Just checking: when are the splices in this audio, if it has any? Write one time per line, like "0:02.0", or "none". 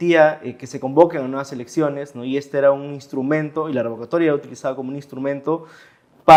none